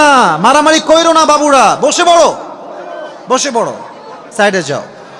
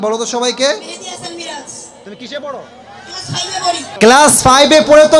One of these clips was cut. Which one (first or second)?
second